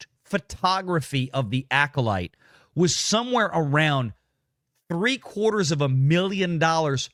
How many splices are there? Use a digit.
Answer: 0